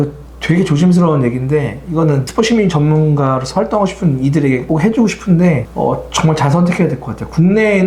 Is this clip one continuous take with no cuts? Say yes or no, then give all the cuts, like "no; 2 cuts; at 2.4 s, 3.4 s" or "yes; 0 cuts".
no; 1 cut; at 2.3 s